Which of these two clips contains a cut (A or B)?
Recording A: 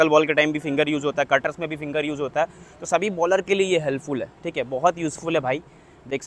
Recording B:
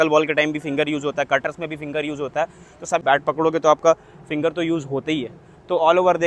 B